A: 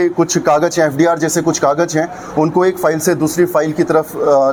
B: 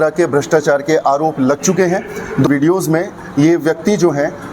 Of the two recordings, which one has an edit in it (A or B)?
B